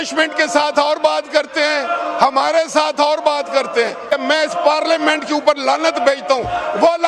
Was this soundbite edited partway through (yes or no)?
yes